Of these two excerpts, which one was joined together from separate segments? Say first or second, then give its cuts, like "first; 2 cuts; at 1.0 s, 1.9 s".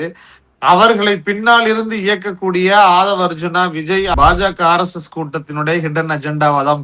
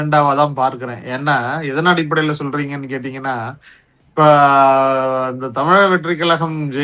first; 1 cut; at 4.2 s